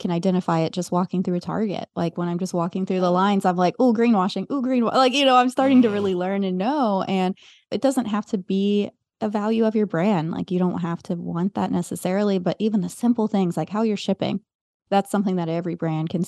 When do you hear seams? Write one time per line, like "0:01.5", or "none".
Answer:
none